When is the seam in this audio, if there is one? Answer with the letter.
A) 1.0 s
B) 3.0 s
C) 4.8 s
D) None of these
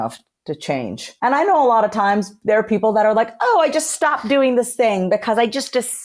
A